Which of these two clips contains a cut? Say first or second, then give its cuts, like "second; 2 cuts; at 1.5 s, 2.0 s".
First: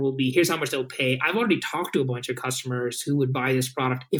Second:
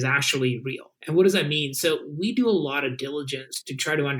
second; 1 cut; at 0.9 s